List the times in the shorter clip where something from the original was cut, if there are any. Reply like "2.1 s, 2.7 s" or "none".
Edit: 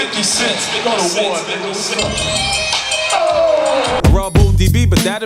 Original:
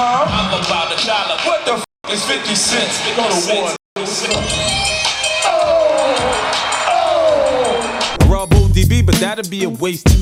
4.0 s

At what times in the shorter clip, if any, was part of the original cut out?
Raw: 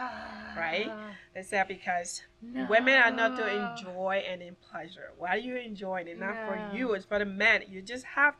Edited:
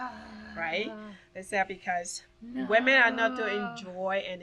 none

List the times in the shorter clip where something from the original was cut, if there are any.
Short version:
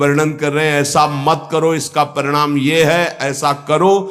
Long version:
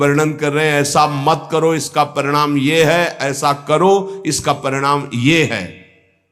none

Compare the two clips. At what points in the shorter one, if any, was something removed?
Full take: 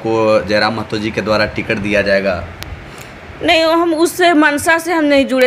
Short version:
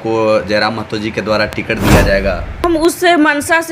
2.6 s

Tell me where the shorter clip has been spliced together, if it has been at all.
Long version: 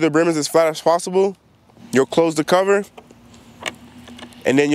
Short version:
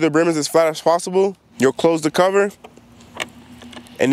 1.4 s, 3.1 s

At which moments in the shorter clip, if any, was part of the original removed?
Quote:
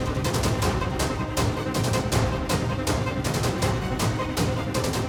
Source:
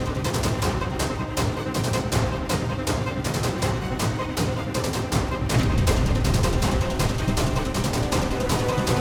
none

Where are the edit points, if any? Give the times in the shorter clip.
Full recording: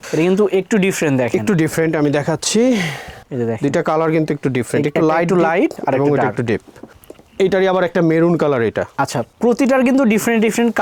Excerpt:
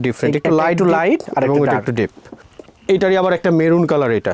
none

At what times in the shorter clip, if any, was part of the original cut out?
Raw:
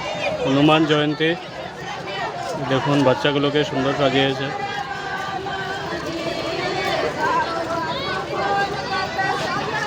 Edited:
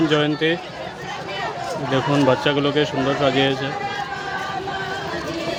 none

